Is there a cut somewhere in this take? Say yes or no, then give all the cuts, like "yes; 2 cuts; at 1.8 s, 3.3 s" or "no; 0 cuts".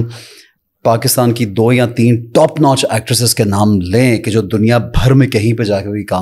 no; 0 cuts